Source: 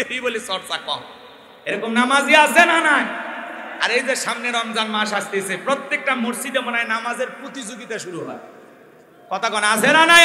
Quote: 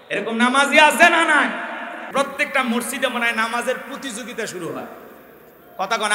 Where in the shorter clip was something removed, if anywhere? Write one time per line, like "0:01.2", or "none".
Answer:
0:02.0